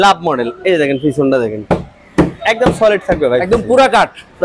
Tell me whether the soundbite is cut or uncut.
uncut